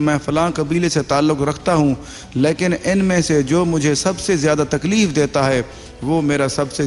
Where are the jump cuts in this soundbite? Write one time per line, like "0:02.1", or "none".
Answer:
none